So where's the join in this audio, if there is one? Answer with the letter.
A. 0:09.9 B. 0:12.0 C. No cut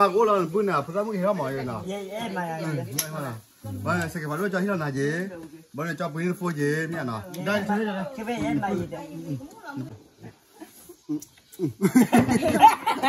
A